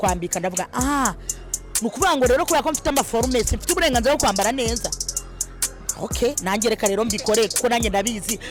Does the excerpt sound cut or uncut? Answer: uncut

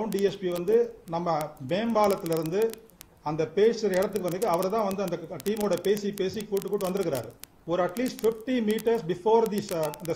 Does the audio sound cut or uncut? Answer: uncut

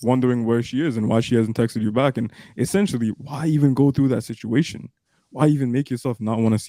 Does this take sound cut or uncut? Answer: uncut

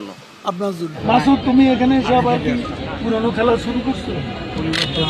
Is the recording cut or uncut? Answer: cut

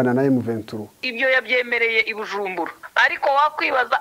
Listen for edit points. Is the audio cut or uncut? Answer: cut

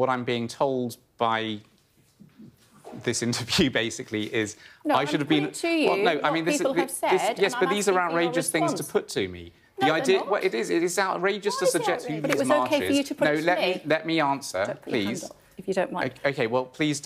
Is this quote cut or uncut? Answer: cut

